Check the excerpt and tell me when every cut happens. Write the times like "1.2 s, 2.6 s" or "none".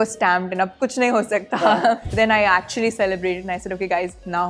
2.1 s